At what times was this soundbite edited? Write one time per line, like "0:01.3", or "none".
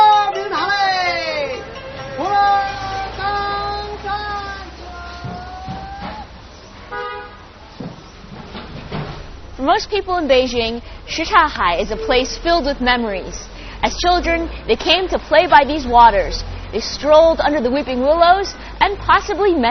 0:05.7